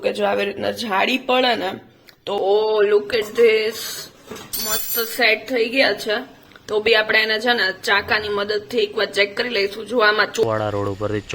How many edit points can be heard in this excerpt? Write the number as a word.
two